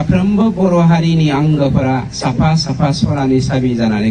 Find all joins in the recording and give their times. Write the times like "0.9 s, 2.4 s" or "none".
2.1 s